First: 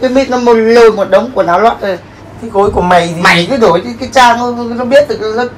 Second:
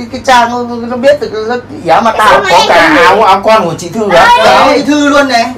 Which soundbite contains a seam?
first; 1 cut; at 2.0 s

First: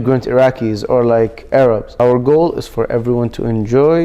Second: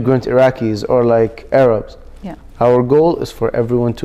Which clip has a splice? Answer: first; 1 cut; at 1.9 s

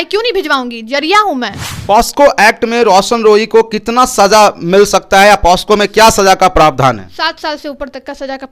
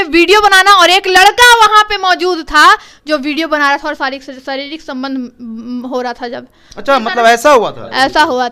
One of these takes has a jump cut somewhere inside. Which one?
first; 1 cut; at 1.7 s

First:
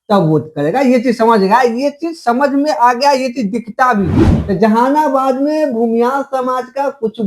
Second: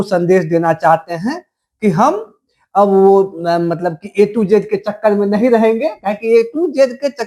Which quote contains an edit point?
first; 1 cut; at 4.3 s

